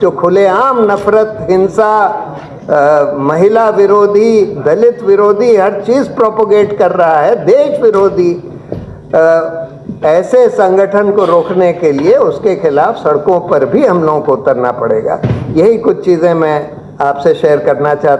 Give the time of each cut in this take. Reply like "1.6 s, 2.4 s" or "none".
none

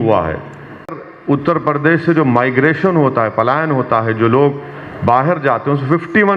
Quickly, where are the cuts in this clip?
1.1 s

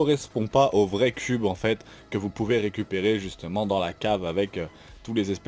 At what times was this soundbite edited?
none

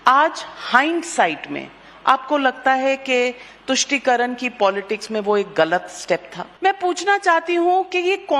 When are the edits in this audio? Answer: 6.4 s

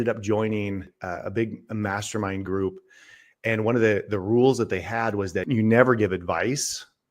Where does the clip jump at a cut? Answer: 0.9 s, 5.4 s

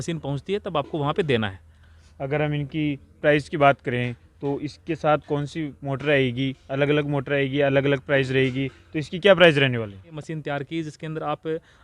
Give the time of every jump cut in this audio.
10.2 s

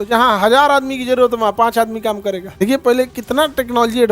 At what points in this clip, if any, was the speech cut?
2.5 s

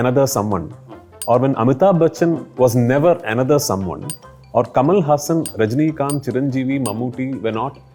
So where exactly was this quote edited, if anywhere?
none

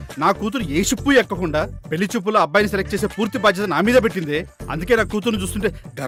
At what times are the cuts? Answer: none

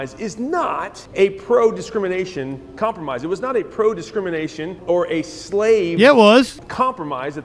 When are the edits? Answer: 1.0 s, 4.8 s, 6.6 s

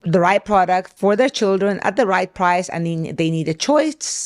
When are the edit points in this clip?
0.9 s

